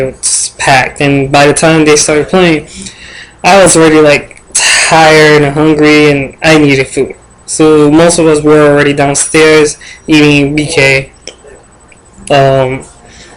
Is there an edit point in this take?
yes; 1 cut; at 10.7 s

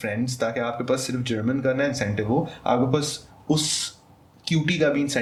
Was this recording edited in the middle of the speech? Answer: no; 0 cuts

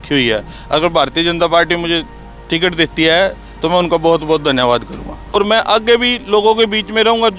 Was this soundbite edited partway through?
yes; 1 cut; at 5.3 s

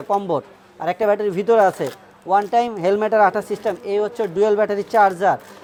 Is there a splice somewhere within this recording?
no; 0 cuts

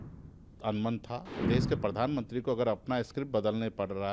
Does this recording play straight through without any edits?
no; 1 cut; at 1.4 s

